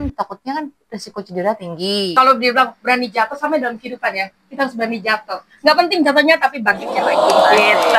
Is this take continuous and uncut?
no; 1 cut; at 2.1 s

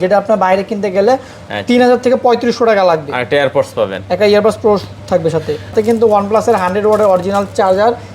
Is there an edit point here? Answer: yes; 1 cut; at 5.7 s

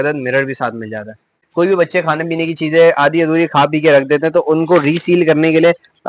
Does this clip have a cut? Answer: yes; 1 cut; at 1.4 s

